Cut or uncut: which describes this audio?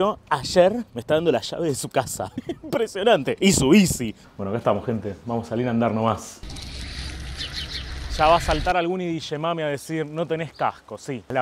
uncut